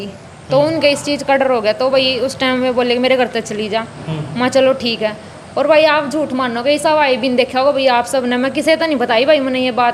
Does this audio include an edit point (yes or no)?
no